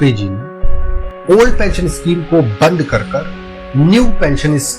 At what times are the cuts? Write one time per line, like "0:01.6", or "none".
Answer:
0:01.1